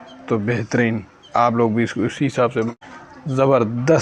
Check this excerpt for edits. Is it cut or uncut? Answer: cut